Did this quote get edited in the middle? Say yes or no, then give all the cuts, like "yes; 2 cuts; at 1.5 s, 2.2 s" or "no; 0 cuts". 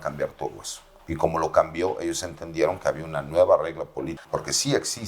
yes; 1 cut; at 4.1 s